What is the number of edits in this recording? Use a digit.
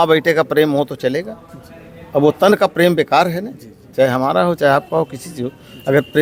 0